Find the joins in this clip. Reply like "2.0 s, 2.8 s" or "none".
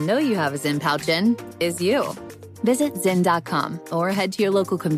none